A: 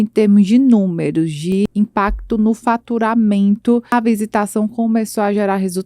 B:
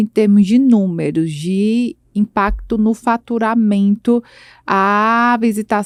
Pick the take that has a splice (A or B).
A